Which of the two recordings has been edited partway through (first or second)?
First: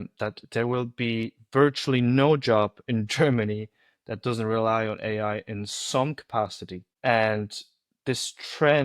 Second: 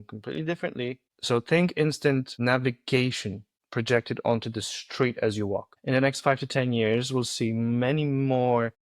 second